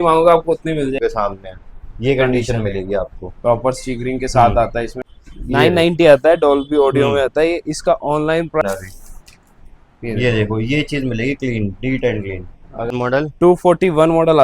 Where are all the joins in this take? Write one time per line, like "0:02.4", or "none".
0:01.0
0:04.9
0:08.6
0:12.9